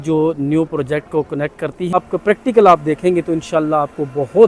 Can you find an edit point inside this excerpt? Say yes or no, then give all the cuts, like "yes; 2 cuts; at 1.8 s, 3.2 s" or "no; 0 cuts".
yes; 1 cut; at 1.9 s